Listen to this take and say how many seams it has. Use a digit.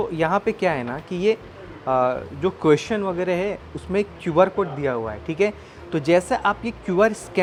0